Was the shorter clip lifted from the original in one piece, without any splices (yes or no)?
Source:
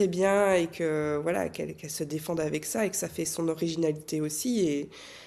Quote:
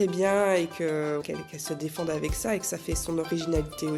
no